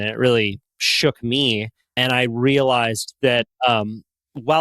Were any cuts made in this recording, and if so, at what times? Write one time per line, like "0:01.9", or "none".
0:01.8